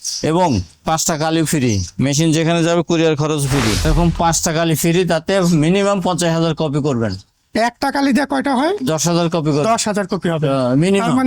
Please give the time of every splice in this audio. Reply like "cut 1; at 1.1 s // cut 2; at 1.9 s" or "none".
cut 1; at 3.9 s

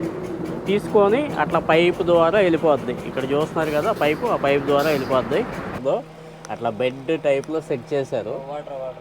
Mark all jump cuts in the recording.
cut 1; at 5.8 s

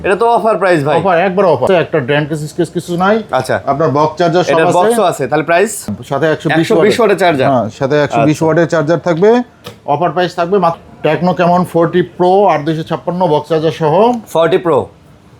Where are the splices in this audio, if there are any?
cut 1; at 1.6 s // cut 2; at 6.0 s // cut 3; at 10.7 s

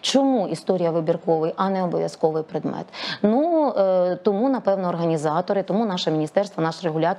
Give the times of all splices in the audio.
none

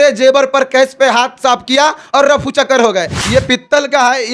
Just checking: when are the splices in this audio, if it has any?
cut 1; at 3.2 s

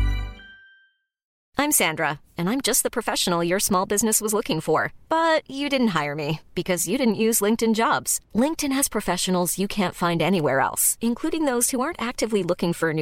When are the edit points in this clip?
cut 1; at 1.4 s

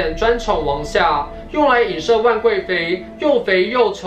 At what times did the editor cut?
none

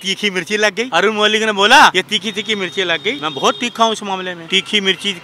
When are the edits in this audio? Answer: cut 1; at 0.8 s // cut 2; at 1.9 s // cut 3; at 3.2 s // cut 4; at 4.4 s

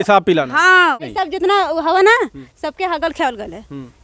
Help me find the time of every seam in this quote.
cut 1; at 1.0 s

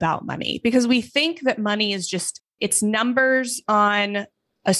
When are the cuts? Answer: none

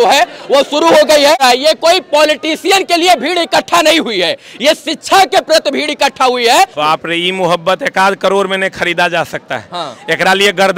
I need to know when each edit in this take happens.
cut 1; at 1.4 s // cut 2; at 6.8 s

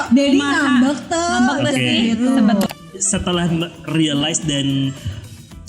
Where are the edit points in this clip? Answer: cut 1; at 2.7 s

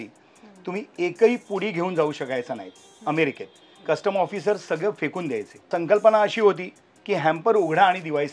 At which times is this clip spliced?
cut 1; at 5.7 s

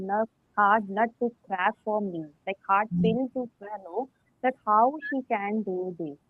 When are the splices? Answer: none

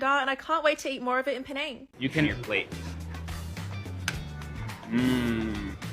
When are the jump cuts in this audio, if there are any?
cut 1; at 2.3 s

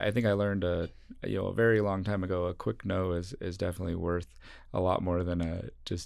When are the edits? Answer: none

